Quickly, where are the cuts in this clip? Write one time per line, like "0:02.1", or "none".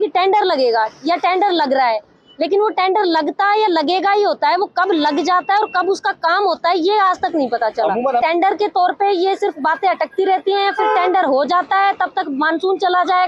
0:08.2